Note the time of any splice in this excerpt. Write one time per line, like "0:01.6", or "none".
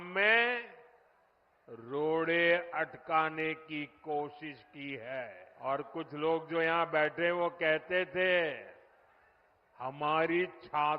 0:05.4